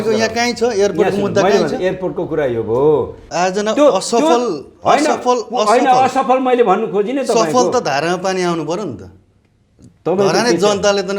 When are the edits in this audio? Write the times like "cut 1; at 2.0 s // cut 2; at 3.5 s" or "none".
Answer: cut 1; at 3.2 s